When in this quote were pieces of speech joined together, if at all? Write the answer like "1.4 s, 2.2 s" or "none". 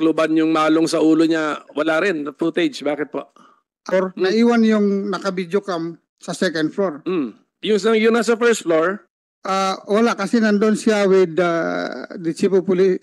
3.9 s